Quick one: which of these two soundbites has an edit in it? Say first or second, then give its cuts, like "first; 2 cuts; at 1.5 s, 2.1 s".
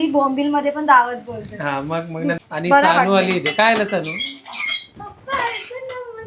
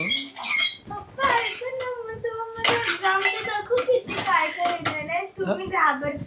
first; 1 cut; at 2.4 s